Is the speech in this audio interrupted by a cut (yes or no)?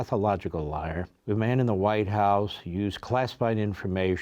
yes